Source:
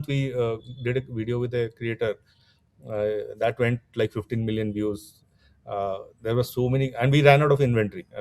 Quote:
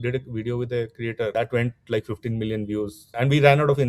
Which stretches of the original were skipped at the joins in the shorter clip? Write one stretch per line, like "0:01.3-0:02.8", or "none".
0:02.1-0:03.4
0:05.2-0:06.9